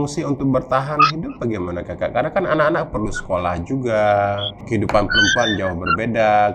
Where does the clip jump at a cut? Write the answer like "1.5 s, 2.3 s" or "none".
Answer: 4.6 s